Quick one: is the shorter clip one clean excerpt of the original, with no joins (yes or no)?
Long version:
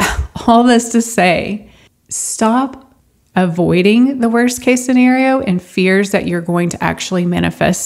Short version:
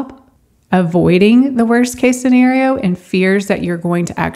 yes